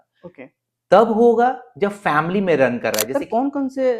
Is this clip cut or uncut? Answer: cut